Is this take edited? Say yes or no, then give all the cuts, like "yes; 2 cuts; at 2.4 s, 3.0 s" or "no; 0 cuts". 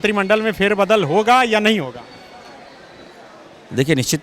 no; 0 cuts